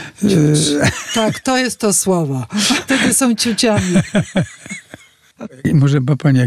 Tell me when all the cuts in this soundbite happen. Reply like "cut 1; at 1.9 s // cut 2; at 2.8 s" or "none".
cut 1; at 1.4 s // cut 2; at 2.8 s // cut 3; at 5.6 s